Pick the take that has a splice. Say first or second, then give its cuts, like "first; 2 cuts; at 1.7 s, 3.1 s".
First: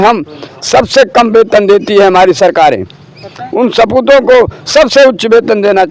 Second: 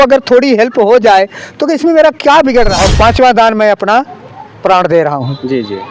second; 1 cut; at 2.7 s